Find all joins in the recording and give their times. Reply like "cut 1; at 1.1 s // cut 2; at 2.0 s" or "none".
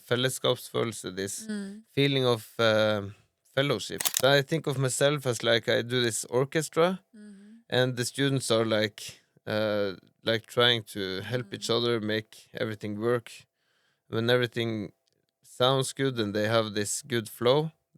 cut 1; at 4.0 s